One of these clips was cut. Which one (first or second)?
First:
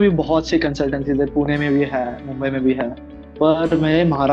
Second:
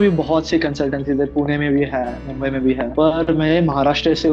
second